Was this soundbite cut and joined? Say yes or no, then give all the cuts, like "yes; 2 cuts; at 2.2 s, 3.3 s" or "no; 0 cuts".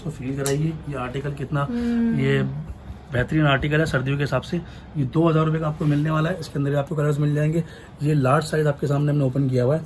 no; 0 cuts